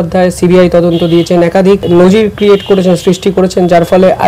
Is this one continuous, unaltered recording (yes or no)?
no